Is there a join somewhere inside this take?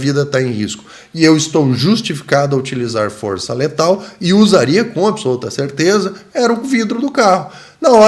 no; 0 cuts

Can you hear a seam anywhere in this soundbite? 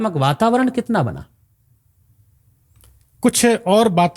no; 0 cuts

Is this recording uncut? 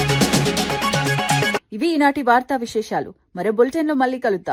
yes; 0 cuts

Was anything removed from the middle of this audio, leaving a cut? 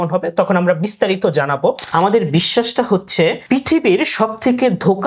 yes; 2 cuts; at 1.8 s, 3.4 s

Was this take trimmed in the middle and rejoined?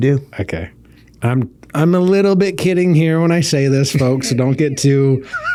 no; 0 cuts

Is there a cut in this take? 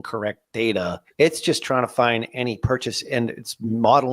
yes; 1 cut; at 1.0 s

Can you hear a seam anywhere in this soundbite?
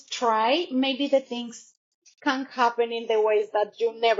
no; 0 cuts

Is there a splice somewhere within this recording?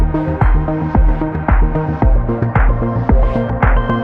no; 0 cuts

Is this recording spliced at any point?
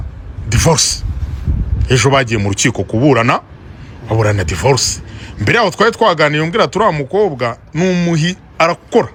no; 0 cuts

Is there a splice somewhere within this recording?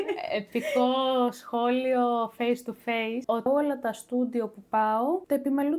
yes; 1 cut; at 3.5 s

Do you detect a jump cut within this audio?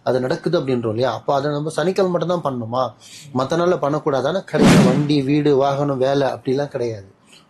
yes; 1 cut; at 4.7 s

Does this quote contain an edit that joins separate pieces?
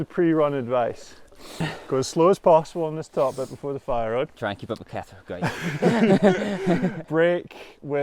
yes; 3 cuts; at 1.7 s, 4.3 s, 7.0 s

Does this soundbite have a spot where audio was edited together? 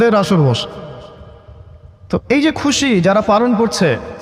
no; 0 cuts

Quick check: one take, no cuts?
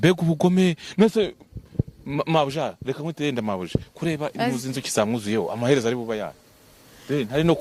yes; 0 cuts

